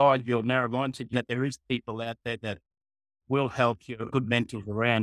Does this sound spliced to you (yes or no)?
yes